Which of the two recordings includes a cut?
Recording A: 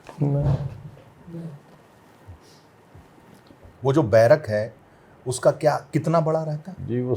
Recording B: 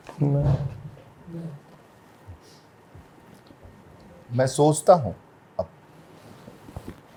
A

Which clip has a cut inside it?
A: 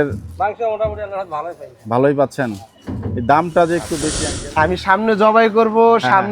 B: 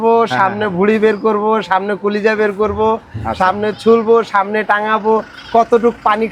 A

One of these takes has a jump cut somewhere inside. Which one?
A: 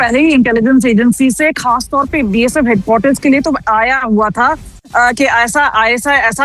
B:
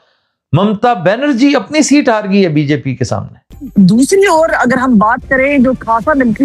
B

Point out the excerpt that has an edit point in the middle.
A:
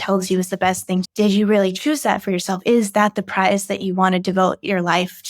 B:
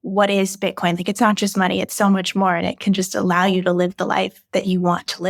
A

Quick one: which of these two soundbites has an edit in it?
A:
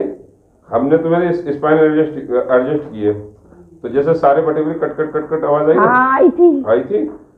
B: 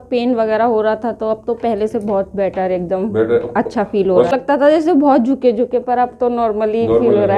B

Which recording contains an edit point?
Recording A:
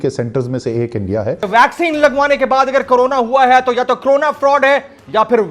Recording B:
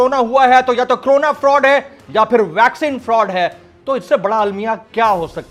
A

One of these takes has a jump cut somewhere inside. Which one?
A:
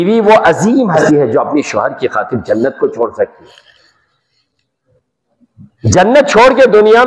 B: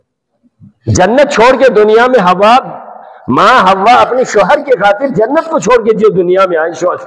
A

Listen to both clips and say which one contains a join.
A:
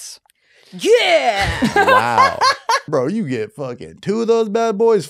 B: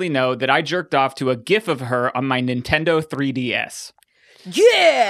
A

